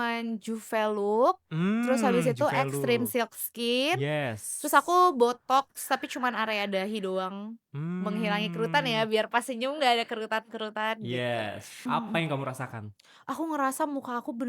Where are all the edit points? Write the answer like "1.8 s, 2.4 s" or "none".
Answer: 11.9 s